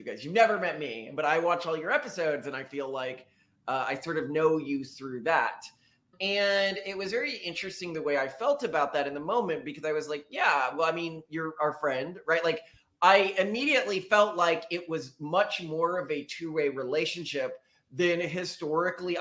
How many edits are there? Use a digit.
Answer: 0